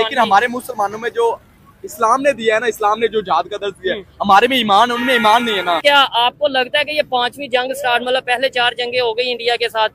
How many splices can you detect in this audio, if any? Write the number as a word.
one